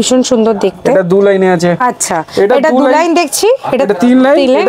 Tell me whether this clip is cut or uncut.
cut